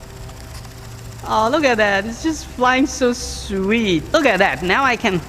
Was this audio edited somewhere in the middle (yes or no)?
yes